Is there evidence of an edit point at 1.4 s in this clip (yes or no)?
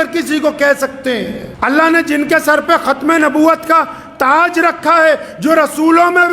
yes